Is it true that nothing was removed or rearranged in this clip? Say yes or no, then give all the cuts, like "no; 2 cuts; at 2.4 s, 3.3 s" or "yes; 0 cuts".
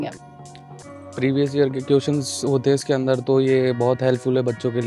yes; 0 cuts